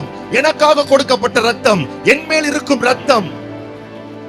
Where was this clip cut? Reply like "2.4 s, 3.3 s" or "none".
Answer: 3.3 s